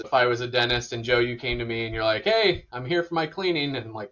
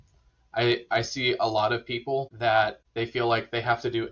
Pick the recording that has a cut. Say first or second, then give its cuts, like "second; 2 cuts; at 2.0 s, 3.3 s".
second; 2 cuts; at 2.3 s, 2.8 s